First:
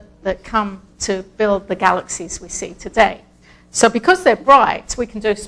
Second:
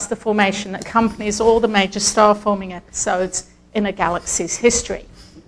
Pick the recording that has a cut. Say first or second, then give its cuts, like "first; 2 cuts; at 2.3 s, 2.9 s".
second; 1 cut; at 4.6 s